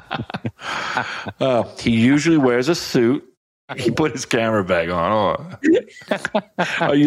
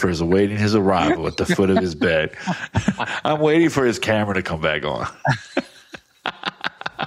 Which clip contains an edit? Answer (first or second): first